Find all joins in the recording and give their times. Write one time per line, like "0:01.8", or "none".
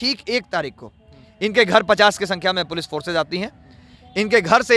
none